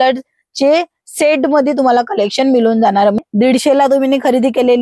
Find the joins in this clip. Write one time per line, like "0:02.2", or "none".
0:03.2

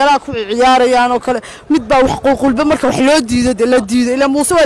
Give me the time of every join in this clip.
none

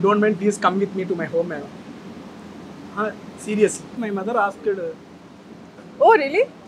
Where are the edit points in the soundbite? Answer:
0:03.9

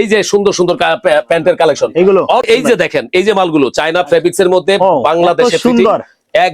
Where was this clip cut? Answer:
0:02.5

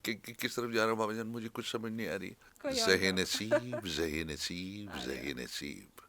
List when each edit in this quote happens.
0:02.4

